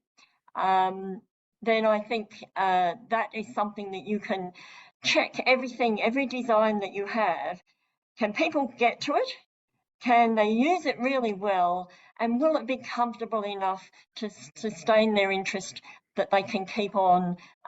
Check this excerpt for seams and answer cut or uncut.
uncut